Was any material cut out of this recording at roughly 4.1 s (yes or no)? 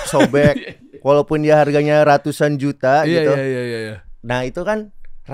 yes